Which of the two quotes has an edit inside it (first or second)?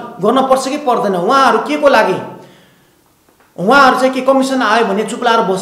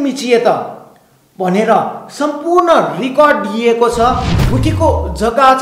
second